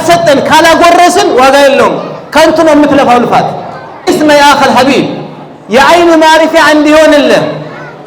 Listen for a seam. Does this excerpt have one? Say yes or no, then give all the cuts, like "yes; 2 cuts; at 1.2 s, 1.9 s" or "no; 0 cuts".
yes; 1 cut; at 4.0 s